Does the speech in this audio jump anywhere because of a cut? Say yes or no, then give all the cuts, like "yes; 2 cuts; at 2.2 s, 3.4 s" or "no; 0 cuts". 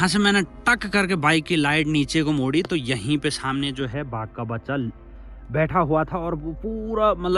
no; 0 cuts